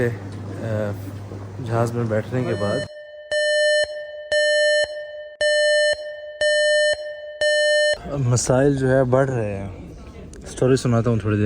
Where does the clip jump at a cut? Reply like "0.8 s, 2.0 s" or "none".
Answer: 8.1 s